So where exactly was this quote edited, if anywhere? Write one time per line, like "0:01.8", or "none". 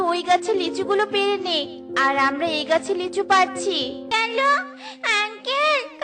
0:04.1